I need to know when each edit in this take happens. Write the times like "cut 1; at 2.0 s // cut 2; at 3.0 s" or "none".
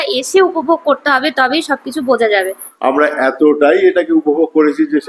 cut 1; at 2.6 s